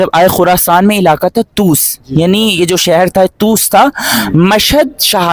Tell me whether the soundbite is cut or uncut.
uncut